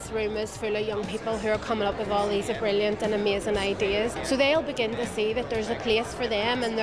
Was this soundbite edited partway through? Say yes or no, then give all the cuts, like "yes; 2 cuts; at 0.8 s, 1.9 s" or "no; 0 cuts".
yes; 1 cut; at 4.2 s